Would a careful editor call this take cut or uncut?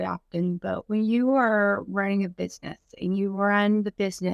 uncut